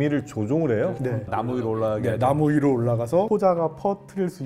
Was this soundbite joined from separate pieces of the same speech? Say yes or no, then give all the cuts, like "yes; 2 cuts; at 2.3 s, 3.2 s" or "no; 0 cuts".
no; 0 cuts